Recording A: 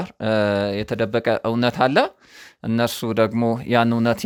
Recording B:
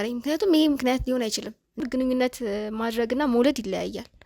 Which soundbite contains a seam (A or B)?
B